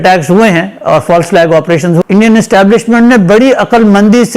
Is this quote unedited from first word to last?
no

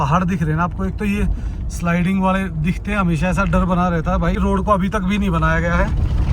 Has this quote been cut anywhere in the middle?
yes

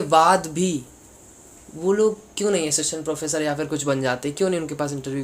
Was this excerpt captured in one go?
yes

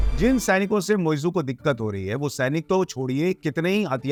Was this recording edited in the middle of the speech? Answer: no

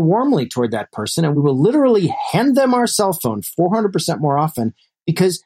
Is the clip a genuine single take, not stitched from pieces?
no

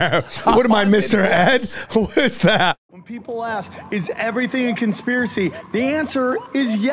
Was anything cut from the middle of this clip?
yes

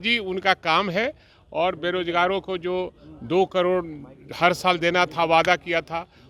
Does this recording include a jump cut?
no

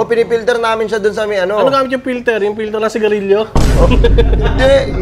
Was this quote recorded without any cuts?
yes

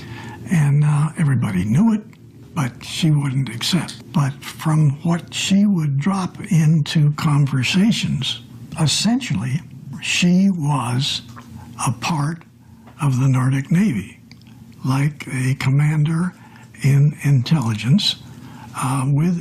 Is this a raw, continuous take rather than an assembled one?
no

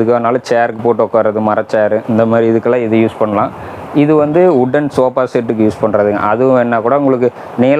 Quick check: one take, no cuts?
yes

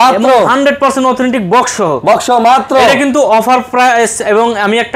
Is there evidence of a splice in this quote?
no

